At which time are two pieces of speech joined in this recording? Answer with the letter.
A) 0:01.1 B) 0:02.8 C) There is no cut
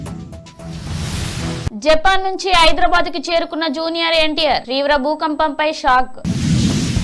A